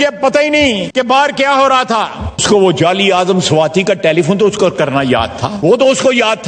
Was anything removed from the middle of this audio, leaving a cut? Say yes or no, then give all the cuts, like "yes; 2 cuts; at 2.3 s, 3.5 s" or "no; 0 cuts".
yes; 3 cuts; at 0.8 s, 2.4 s, 5.5 s